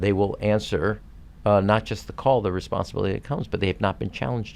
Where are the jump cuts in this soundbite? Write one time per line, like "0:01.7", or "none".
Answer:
none